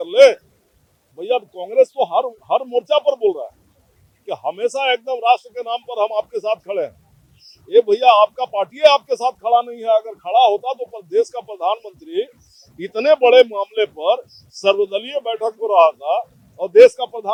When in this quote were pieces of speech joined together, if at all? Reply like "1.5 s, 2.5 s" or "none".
none